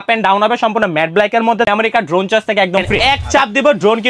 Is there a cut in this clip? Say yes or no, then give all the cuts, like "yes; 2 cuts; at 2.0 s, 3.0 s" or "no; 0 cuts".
yes; 2 cuts; at 1.7 s, 3.2 s